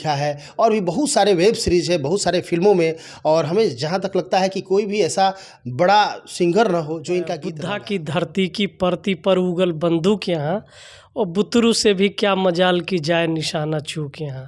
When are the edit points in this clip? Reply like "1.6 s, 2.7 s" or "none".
7.5 s